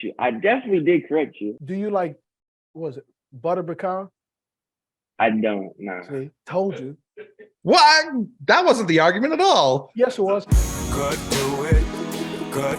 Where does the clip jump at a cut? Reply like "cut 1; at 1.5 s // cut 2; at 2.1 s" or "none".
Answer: cut 1; at 1.5 s // cut 2; at 10.4 s